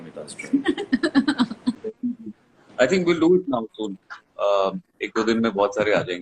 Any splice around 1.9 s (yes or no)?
yes